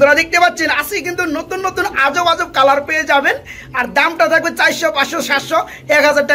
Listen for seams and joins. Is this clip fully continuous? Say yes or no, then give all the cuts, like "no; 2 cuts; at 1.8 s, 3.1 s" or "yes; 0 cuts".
yes; 0 cuts